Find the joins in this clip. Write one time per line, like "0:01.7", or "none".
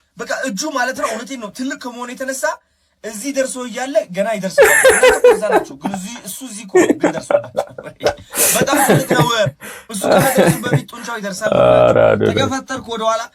none